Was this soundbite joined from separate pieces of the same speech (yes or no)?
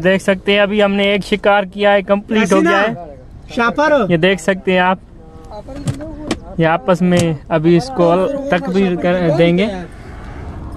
no